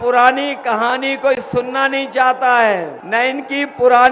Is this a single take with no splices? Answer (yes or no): no